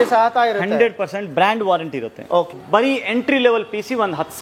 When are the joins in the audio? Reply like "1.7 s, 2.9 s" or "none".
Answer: 2.5 s